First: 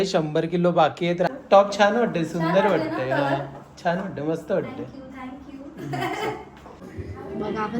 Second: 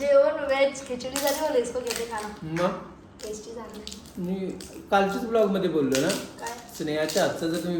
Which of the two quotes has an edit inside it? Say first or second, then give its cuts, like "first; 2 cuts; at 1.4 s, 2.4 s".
first; 2 cuts; at 1.3 s, 6.8 s